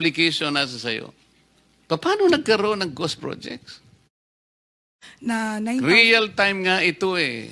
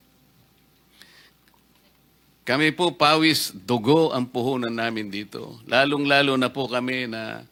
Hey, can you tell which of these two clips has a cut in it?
first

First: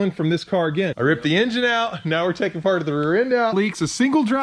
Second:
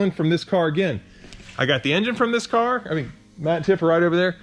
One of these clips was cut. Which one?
first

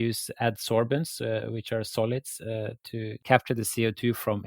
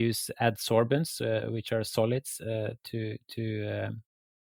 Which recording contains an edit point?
first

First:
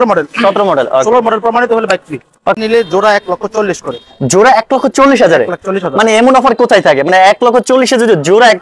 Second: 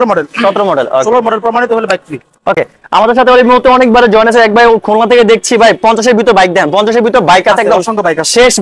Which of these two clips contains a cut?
first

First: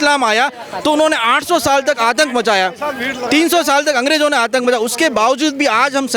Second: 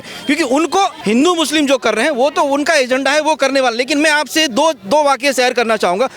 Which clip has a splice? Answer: second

